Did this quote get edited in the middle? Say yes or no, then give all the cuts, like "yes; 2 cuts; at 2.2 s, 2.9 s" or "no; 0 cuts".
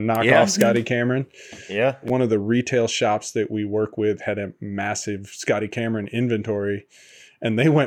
yes; 1 cut; at 2.0 s